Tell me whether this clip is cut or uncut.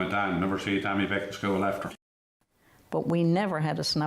cut